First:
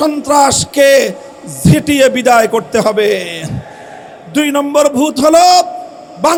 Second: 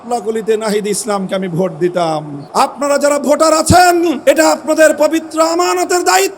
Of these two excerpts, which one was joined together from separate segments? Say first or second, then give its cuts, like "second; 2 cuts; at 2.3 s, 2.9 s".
second; 2 cuts; at 2.4 s, 4.2 s